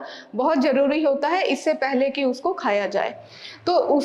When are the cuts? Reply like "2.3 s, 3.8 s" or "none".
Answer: none